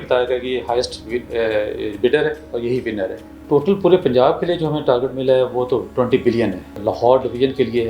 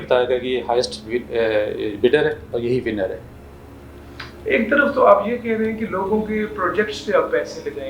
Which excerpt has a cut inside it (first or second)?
first